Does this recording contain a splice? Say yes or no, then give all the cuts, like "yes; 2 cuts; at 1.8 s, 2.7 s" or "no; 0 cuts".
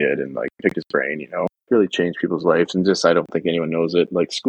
yes; 1 cut; at 1.6 s